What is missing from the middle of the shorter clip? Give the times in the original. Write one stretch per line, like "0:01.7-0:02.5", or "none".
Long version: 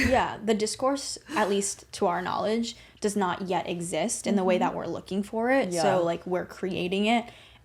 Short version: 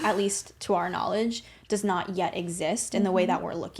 none